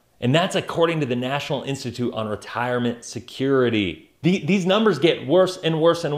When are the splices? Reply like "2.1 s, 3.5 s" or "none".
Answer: 4.1 s